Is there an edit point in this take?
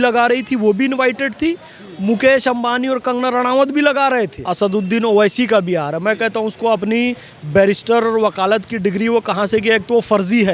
yes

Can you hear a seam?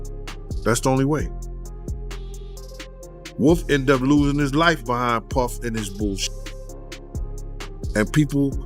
yes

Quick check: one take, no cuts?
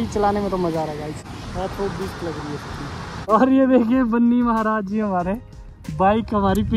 no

